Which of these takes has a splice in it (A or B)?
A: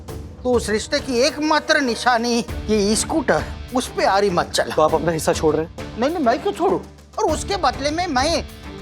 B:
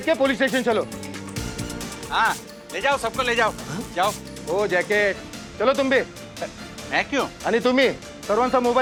A